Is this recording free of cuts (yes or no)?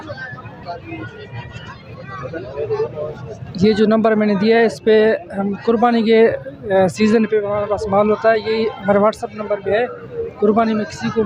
yes